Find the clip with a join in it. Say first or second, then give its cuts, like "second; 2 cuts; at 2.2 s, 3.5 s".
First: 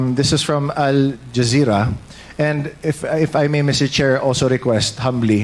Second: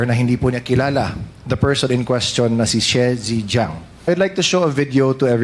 second; 1 cut; at 3.9 s